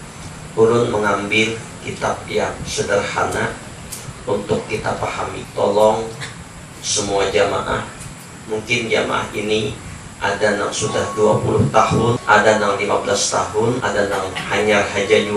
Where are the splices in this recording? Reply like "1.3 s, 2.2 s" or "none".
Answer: 5.4 s, 12.2 s, 13.8 s